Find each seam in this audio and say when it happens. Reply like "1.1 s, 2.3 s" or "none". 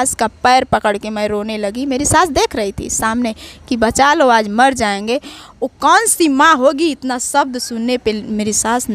none